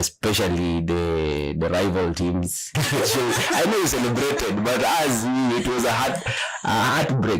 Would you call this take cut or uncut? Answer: cut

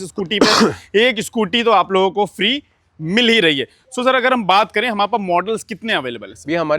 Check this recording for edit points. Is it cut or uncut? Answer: uncut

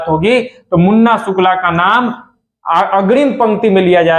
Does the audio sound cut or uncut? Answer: uncut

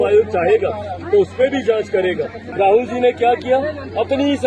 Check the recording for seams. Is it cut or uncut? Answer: cut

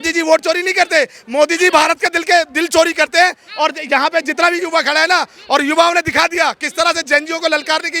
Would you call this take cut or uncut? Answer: uncut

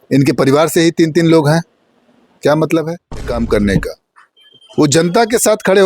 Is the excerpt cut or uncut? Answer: cut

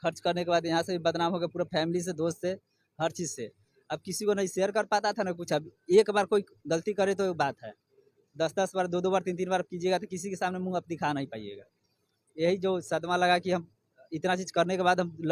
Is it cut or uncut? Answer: uncut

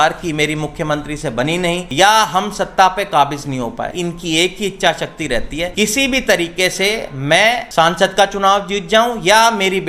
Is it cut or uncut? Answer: cut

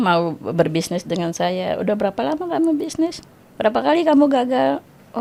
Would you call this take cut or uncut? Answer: uncut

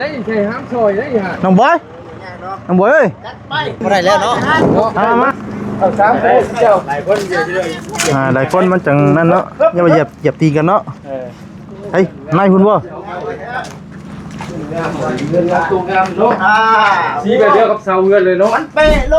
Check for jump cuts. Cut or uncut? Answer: cut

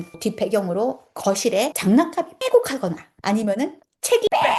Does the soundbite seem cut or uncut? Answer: uncut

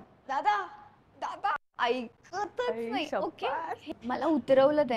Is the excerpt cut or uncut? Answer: uncut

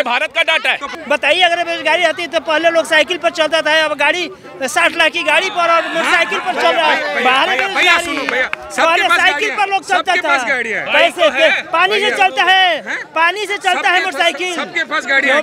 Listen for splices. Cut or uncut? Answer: cut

